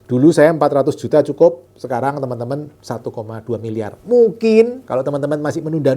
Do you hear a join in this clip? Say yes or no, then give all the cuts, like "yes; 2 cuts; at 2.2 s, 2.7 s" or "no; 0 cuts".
yes; 2 cuts; at 2.7 s, 4.8 s